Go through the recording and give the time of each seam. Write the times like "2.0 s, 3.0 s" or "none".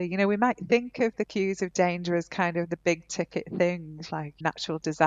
4.1 s

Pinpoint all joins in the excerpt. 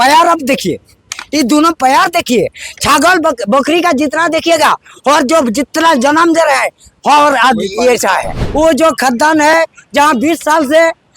8.4 s

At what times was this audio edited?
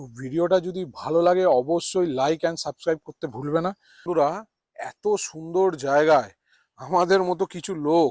3.9 s

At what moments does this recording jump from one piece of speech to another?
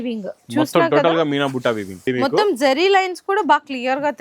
2.0 s

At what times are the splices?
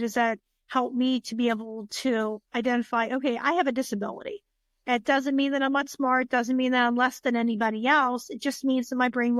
none

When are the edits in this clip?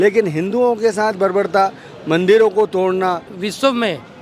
3.3 s

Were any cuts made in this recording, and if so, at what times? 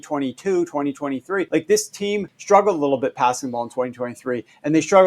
1.5 s, 2.3 s

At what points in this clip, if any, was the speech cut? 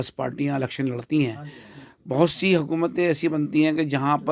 none

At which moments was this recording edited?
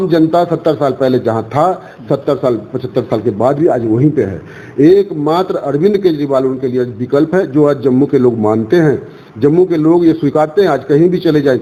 none

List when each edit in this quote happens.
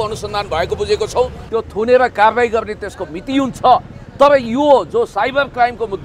1.4 s

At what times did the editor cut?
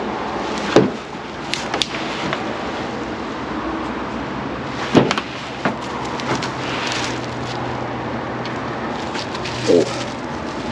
none

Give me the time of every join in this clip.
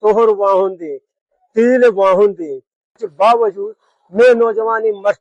3.0 s

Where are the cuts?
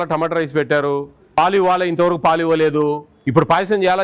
1.4 s, 3.1 s

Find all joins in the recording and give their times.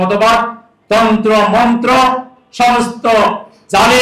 none

